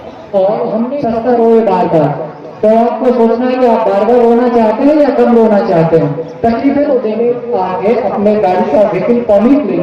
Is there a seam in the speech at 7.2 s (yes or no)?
yes